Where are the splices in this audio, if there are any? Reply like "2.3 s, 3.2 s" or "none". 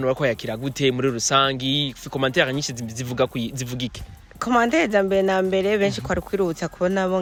none